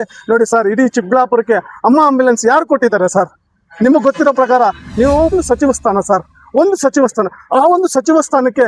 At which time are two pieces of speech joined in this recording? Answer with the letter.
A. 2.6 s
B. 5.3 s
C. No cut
B